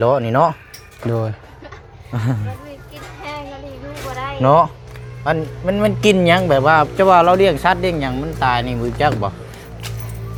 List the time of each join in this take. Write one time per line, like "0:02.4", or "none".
none